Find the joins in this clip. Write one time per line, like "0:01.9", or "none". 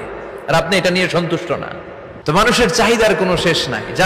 0:02.0